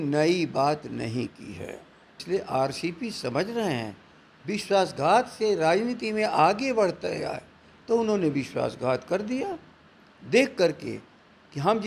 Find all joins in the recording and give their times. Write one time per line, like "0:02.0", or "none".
0:02.2